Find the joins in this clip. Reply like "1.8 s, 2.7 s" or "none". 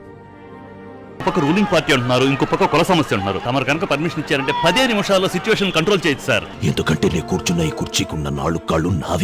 1.2 s, 3.4 s, 6.5 s